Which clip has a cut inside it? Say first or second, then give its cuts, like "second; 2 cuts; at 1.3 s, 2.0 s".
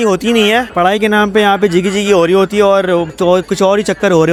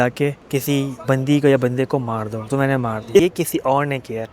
second; 1 cut; at 3.2 s